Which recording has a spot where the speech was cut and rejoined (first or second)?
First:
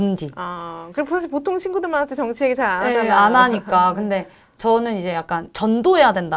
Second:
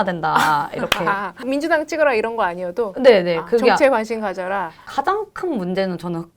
second